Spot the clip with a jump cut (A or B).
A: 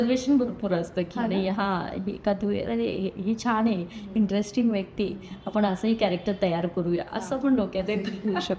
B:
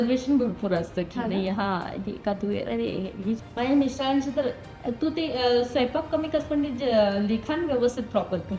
B